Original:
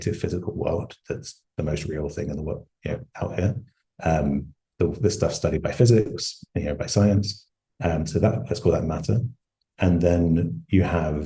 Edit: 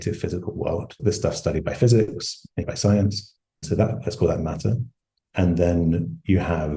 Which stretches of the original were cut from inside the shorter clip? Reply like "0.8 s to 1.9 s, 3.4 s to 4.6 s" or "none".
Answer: 1.0 s to 5.0 s, 6.6 s to 6.7 s, 7.7 s to 8.1 s